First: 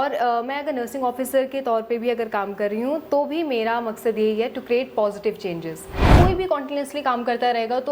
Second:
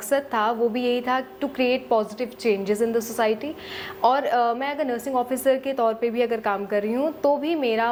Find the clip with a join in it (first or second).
first